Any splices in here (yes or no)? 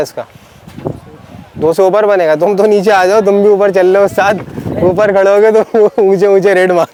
no